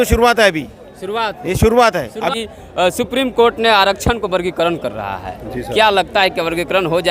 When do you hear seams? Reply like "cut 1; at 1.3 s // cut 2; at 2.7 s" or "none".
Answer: cut 1; at 2.3 s